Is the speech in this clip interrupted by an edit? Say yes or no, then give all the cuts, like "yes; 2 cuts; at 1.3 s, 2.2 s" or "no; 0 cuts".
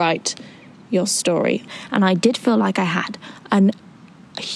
yes; 1 cut; at 1.7 s